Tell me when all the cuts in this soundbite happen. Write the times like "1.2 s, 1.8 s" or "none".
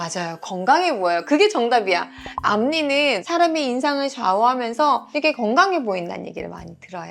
none

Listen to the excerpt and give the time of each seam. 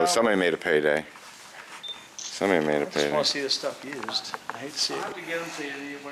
4.6 s

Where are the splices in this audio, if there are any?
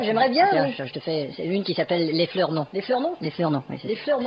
1.3 s

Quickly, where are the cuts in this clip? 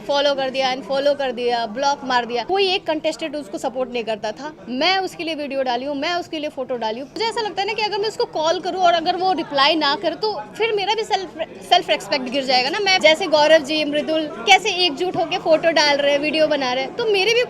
2.4 s, 7.2 s, 13.0 s

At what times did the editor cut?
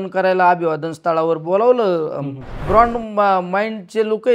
2.6 s

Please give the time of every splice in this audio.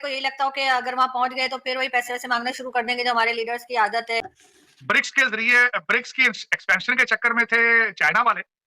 4.2 s

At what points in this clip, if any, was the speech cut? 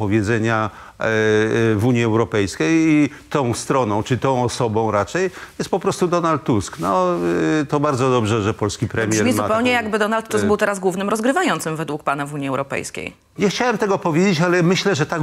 none

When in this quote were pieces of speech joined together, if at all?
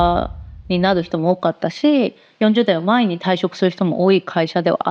none

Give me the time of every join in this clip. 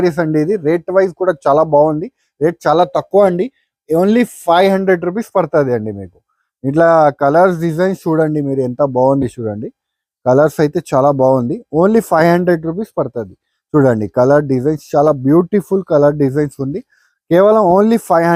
none

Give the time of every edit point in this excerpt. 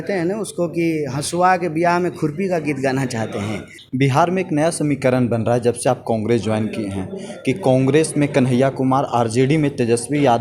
3.7 s

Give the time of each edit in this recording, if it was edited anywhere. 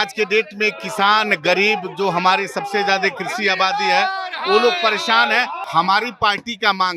5.6 s

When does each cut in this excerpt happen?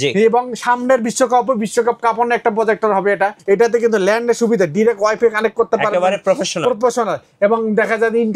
3.4 s

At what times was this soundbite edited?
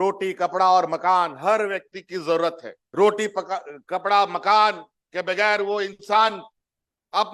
none

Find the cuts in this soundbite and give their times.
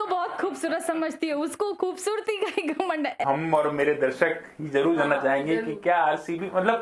3.2 s

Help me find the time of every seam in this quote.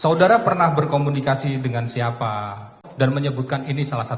2.9 s

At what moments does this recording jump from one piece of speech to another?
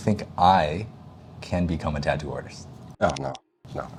none

